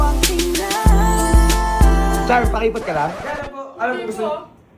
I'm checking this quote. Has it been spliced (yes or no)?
yes